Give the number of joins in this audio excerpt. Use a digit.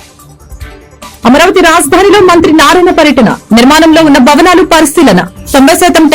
1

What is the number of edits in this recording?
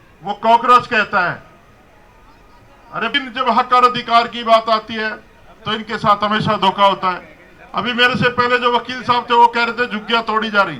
1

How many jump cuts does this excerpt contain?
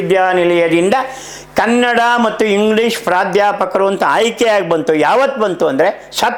0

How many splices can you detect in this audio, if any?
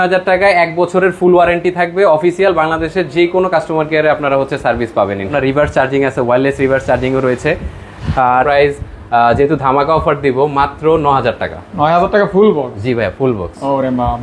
2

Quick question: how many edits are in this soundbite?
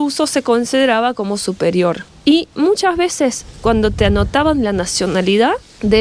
1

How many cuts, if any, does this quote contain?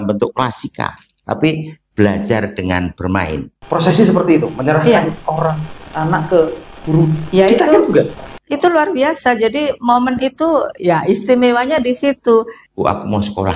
2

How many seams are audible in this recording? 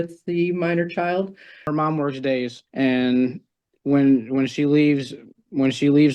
2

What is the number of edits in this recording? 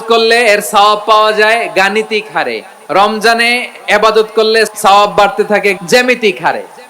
2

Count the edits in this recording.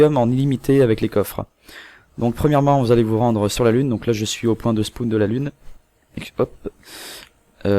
1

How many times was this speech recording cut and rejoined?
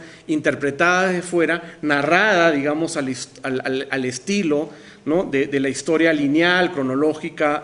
1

